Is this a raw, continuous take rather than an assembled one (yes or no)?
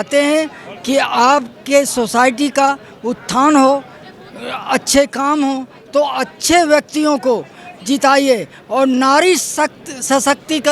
yes